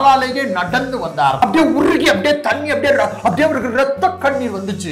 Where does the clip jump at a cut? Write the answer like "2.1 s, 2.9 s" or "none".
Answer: 1.4 s